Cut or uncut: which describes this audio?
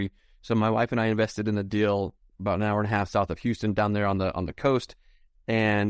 uncut